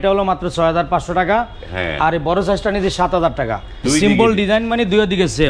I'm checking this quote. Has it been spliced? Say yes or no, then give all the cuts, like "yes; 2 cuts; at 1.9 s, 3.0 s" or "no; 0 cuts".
yes; 1 cut; at 3.7 s